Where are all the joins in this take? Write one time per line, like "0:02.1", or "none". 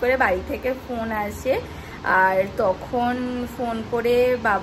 none